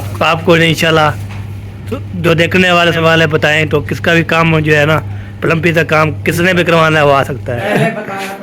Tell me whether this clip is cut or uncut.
cut